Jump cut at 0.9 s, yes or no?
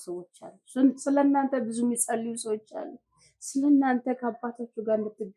no